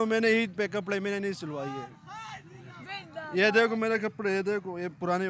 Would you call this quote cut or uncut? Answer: uncut